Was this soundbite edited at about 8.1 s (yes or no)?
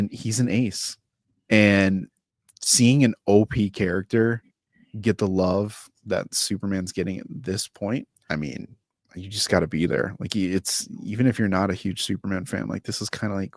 yes